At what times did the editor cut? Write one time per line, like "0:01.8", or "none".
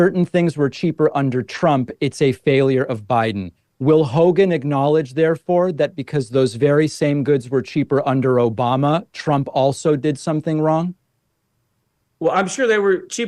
none